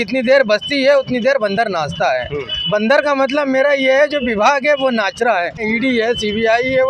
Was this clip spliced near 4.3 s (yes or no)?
no